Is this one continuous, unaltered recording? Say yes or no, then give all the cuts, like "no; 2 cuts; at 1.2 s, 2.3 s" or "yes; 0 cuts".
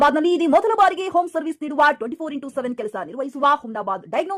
yes; 0 cuts